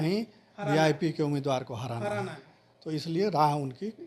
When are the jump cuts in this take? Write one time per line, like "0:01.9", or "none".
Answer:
none